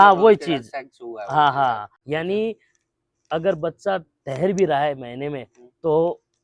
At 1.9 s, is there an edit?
yes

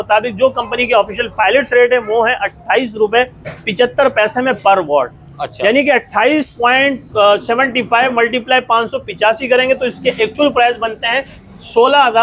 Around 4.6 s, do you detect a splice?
no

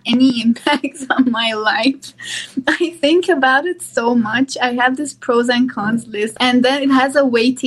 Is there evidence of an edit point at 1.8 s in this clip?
no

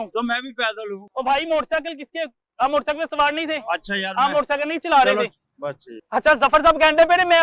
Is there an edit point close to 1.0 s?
no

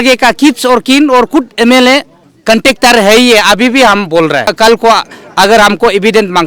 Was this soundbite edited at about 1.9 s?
no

